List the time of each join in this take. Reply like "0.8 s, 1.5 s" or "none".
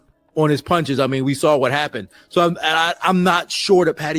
none